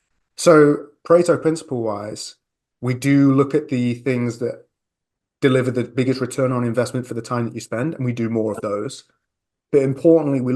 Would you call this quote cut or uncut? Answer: uncut